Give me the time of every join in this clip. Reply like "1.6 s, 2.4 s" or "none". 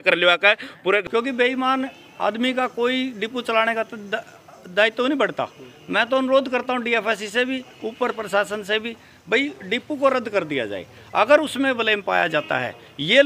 1.0 s